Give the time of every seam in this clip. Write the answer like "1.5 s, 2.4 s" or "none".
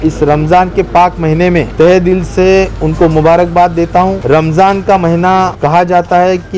1.7 s, 4.2 s, 5.5 s